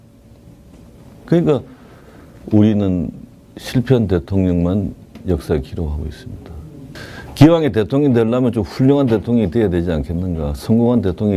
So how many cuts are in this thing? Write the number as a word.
one